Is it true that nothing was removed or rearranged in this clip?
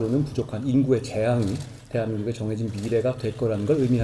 yes; 0 cuts

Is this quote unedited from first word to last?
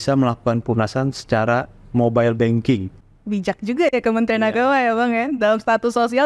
no; 2 cuts; at 1.8 s, 3.0 s

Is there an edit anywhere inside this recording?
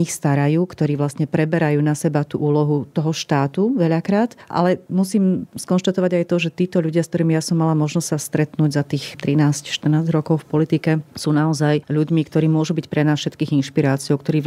no; 0 cuts

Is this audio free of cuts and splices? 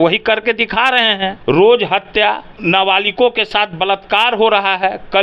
no; 2 cuts; at 1.4 s, 2.5 s

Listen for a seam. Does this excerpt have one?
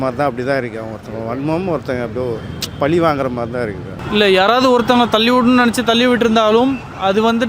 yes; 1 cut; at 3.9 s

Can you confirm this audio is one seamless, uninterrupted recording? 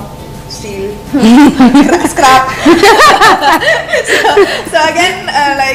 yes; 0 cuts

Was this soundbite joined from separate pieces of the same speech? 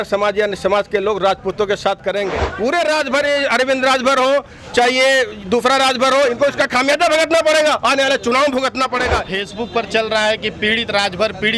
yes; 2 cuts; at 2.4 s, 9.3 s

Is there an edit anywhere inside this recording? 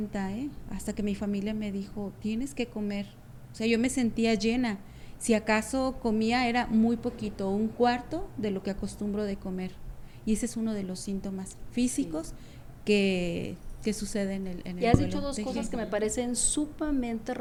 no; 0 cuts

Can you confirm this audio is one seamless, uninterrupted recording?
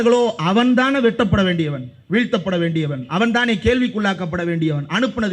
yes; 0 cuts

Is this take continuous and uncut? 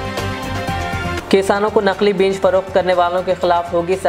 yes; 0 cuts

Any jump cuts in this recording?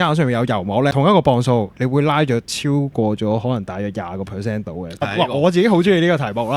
yes; 3 cuts; at 0.9 s, 2.5 s, 5.0 s

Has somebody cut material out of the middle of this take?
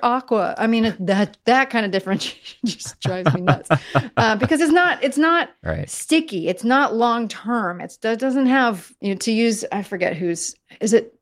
yes; 1 cut; at 8.9 s

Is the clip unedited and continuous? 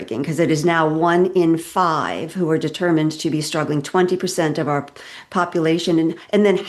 yes; 0 cuts

